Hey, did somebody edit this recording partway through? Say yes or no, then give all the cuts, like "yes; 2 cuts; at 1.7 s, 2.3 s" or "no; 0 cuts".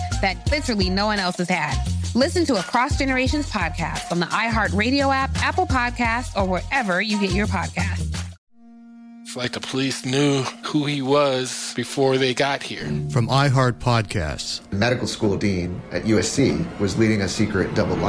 yes; 1 cut; at 8.3 s